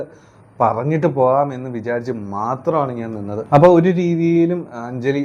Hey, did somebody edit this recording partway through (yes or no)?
yes